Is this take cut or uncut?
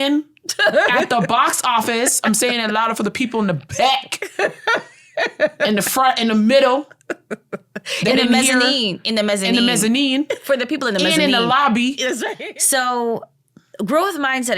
cut